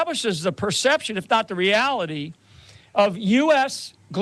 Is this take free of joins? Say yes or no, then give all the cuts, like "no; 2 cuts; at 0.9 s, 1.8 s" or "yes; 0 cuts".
yes; 0 cuts